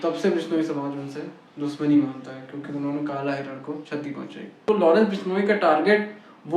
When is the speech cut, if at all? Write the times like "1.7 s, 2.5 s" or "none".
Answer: 4.5 s